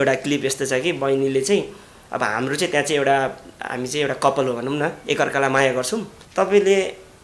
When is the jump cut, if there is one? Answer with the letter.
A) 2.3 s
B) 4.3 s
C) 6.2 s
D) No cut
C